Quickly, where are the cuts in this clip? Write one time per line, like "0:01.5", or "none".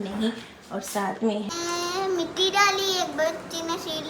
0:01.5